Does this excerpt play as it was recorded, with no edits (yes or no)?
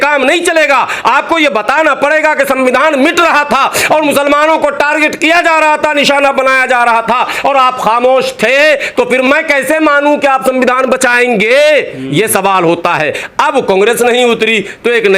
yes